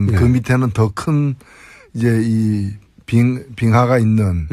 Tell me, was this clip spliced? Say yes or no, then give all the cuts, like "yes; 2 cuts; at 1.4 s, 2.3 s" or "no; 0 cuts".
yes; 1 cut; at 1.2 s